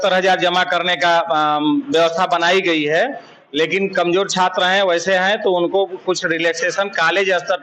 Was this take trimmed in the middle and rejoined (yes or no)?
no